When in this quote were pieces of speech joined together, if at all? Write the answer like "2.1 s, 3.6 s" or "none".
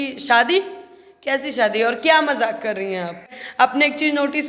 3.4 s